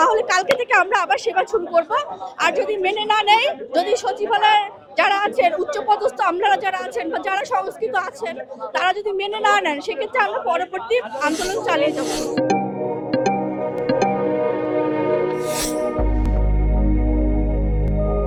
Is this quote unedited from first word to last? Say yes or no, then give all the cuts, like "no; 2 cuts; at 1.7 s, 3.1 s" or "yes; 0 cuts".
yes; 0 cuts